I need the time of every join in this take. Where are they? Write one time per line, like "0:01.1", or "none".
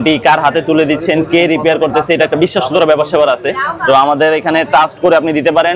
none